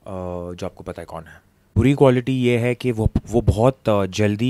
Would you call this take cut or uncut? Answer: cut